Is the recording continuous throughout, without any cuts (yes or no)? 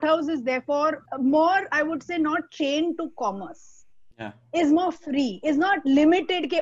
no